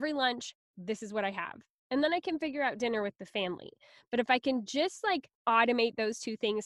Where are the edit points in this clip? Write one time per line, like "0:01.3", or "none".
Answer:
0:05.3